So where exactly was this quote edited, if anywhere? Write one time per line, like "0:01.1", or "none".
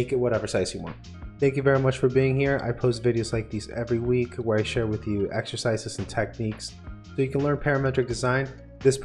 0:01.2